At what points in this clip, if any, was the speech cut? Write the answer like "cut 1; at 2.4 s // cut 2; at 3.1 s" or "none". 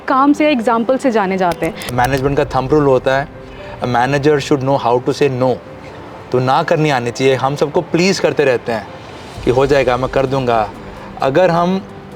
cut 1; at 1.9 s

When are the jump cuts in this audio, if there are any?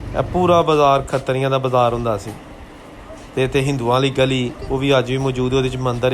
none

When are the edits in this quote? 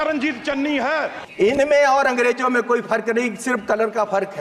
cut 1; at 1.2 s

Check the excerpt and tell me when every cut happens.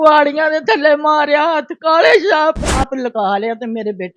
cut 1; at 2.8 s

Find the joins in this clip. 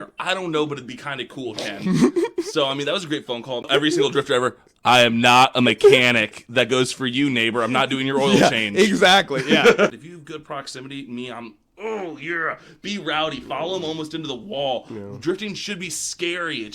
cut 1; at 3.7 s // cut 2; at 9.9 s

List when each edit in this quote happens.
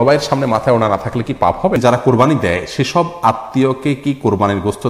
cut 1; at 1.8 s

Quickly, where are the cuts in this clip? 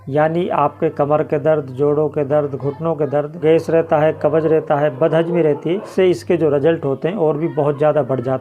cut 1; at 3.4 s // cut 2; at 5.9 s

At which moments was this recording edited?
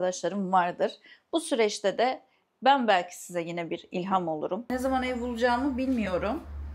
cut 1; at 4.7 s

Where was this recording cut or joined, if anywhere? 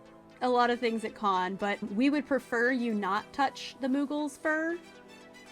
cut 1; at 1.8 s

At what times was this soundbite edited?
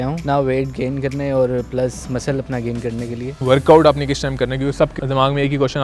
cut 1; at 3.4 s // cut 2; at 5.0 s

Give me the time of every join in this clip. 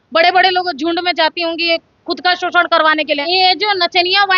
cut 1; at 3.2 s

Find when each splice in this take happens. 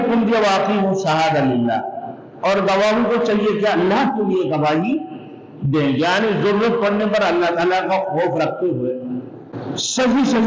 cut 1; at 9.5 s

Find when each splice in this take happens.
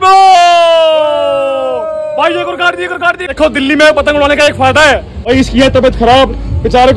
cut 1; at 1.9 s // cut 2; at 3.3 s // cut 3; at 5.2 s

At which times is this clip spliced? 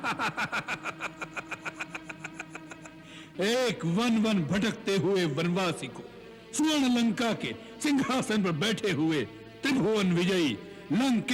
none

